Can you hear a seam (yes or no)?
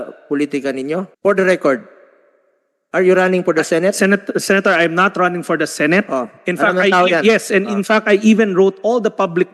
yes